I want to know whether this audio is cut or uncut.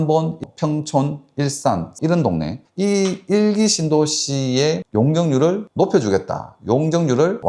uncut